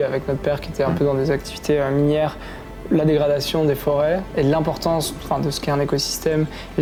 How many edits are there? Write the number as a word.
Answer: zero